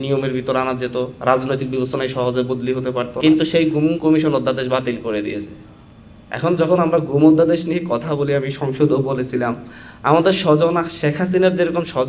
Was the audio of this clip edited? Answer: yes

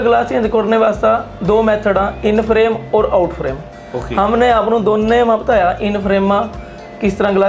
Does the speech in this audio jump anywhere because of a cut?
no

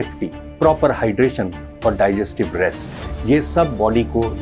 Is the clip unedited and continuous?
yes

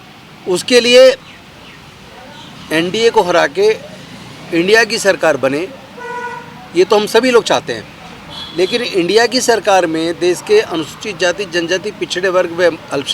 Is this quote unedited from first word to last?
yes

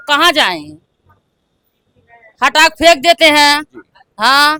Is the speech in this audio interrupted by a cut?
no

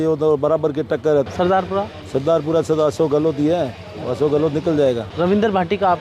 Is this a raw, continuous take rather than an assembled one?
no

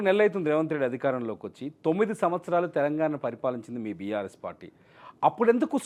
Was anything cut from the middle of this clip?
no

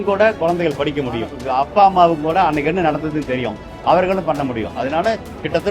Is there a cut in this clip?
yes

